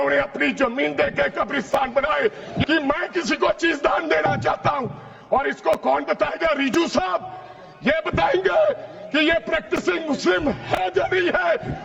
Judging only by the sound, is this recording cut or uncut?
cut